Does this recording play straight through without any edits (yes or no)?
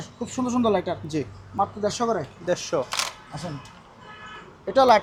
yes